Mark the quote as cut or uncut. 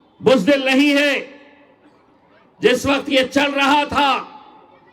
uncut